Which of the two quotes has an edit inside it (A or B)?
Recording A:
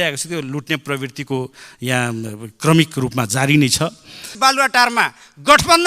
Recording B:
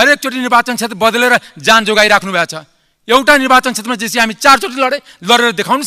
A